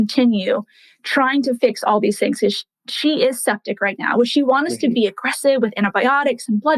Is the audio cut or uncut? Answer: uncut